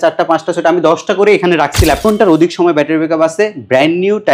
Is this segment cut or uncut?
cut